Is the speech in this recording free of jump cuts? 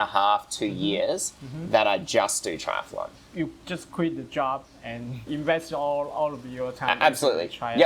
yes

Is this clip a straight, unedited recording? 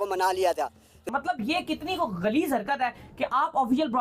no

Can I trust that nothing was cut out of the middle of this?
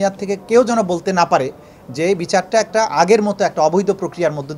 yes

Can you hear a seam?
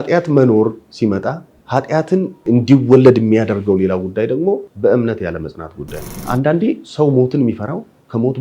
yes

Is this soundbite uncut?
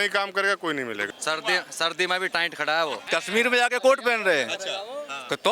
no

